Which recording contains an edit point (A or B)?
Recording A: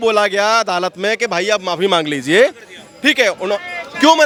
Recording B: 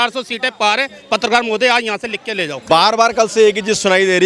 B